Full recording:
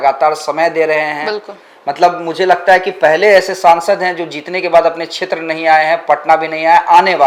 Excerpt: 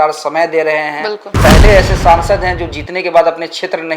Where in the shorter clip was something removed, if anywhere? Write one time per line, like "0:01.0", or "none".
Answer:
0:01.3

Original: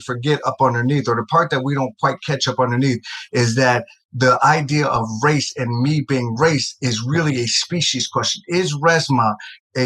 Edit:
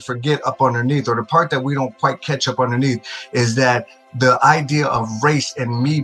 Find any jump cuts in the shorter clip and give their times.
none

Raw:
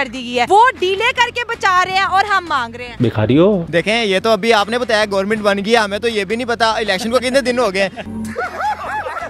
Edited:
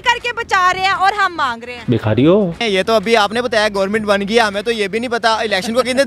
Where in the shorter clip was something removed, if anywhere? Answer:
0:02.6

